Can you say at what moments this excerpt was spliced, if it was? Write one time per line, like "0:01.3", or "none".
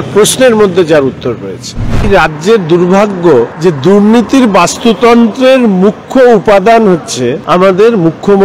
0:02.0
0:03.5
0:07.4